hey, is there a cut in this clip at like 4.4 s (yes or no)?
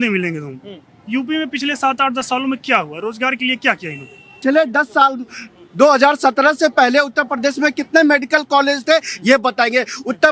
yes